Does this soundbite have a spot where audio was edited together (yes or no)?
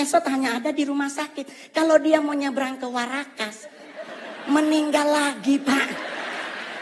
no